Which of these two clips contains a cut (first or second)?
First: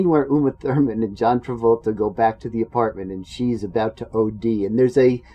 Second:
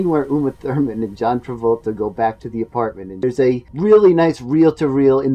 second